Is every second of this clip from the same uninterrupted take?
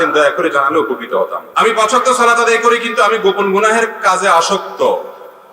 no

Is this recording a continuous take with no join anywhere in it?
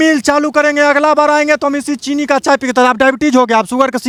yes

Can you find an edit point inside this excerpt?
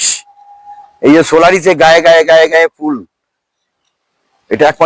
no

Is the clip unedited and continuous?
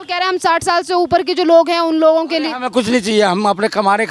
yes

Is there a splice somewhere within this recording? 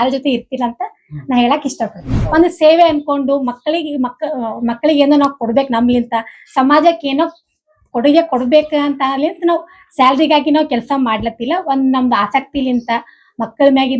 yes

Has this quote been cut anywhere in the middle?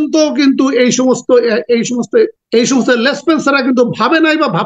yes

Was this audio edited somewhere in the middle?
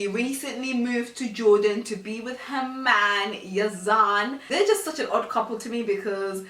no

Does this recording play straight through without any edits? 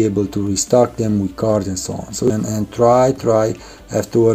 no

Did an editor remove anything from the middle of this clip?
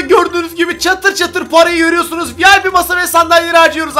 no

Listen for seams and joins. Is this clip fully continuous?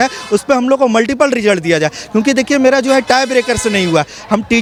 yes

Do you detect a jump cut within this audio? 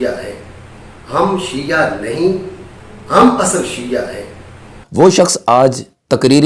no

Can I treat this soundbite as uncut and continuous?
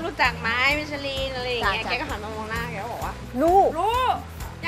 yes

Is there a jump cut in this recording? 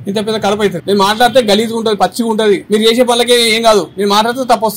yes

